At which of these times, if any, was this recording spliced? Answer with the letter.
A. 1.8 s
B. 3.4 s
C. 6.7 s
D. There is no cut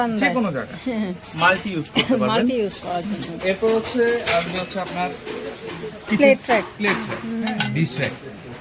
B